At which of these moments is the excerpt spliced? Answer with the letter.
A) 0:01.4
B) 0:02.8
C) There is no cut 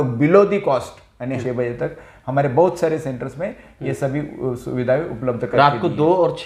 A